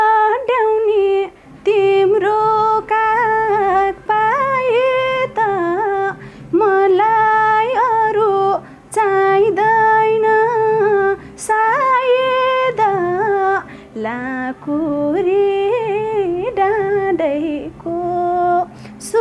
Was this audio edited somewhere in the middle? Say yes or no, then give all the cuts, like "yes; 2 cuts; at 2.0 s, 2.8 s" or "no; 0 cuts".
no; 0 cuts